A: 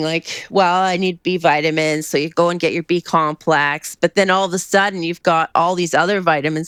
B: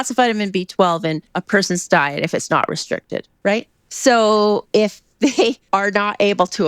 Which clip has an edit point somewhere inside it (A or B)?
B